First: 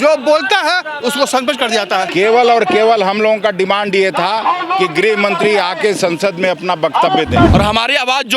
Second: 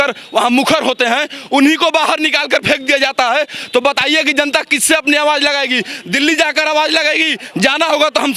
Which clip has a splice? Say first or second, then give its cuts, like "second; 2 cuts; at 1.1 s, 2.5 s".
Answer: first; 2 cuts; at 2.1 s, 7.5 s